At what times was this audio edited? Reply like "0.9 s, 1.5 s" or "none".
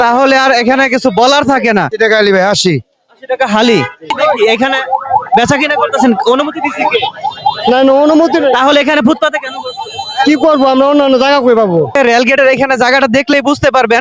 1.9 s, 4.1 s, 12.0 s